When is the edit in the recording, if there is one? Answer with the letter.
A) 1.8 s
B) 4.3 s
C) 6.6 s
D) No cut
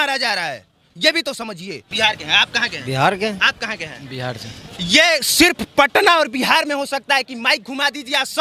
A